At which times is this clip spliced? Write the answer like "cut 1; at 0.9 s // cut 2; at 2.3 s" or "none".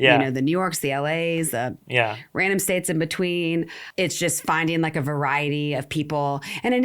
cut 1; at 3.8 s